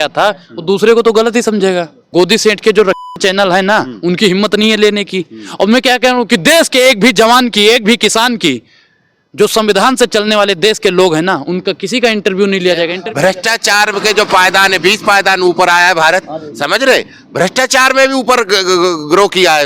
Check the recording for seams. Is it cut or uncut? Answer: cut